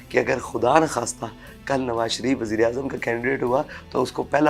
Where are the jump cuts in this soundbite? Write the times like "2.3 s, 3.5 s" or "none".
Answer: none